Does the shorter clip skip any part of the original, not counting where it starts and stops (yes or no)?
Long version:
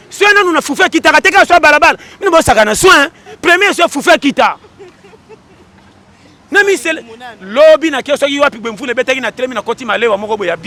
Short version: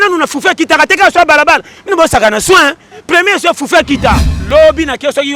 yes